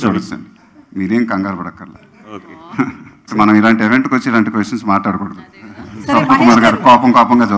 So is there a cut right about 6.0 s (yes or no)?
no